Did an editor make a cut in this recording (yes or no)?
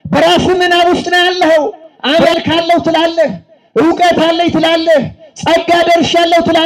yes